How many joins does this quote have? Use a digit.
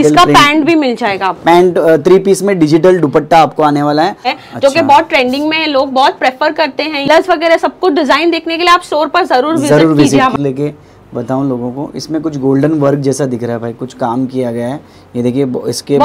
3